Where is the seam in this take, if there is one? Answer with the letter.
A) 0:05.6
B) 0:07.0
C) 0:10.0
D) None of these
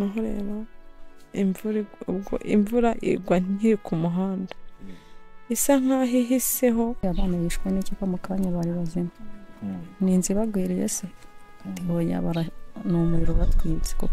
B